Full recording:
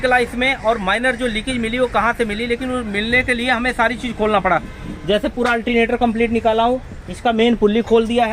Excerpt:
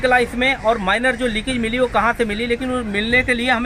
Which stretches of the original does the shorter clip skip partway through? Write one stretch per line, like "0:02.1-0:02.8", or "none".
none